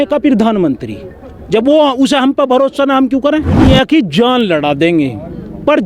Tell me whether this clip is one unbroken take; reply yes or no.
no